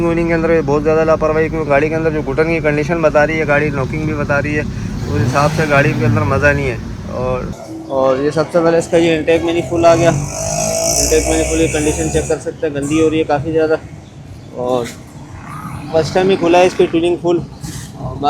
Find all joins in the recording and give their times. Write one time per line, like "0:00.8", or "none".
0:07.5